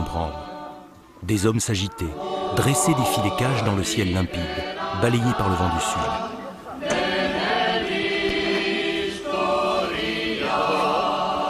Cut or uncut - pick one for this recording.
uncut